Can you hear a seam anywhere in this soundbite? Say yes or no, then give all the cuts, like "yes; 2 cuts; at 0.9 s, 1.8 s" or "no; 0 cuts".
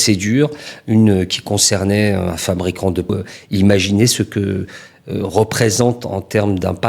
yes; 1 cut; at 3.1 s